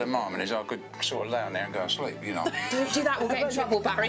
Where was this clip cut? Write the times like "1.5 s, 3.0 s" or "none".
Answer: none